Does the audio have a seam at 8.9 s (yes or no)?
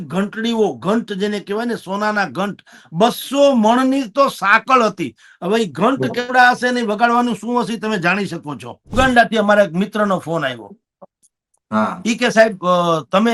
yes